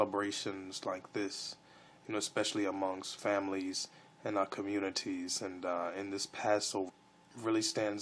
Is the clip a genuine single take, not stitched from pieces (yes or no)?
yes